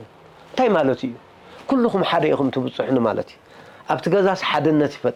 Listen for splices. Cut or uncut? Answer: uncut